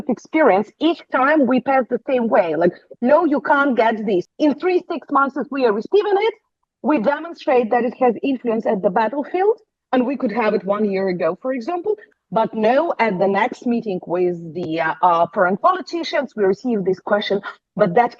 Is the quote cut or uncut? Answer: cut